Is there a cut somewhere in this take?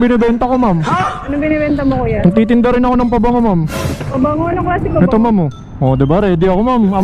no; 0 cuts

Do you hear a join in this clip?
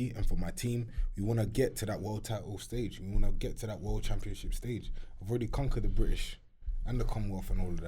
no; 0 cuts

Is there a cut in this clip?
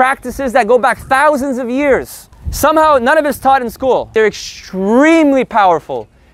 no; 0 cuts

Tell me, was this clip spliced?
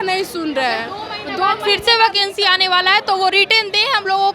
no; 0 cuts

